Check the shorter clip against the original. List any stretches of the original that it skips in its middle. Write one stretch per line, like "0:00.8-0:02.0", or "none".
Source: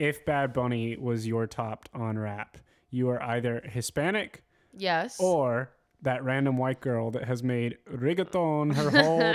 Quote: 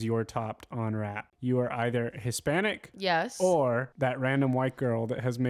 0:02.5-0:02.8
0:04.4-0:04.7
0:05.7-0:05.9